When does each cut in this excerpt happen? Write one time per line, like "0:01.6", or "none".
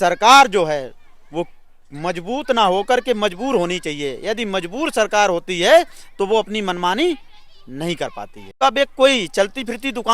0:08.5